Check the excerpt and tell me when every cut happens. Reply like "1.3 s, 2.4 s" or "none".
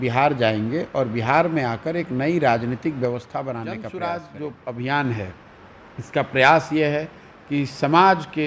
3.9 s